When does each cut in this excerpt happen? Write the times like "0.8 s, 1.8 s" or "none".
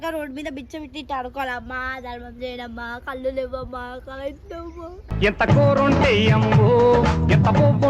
none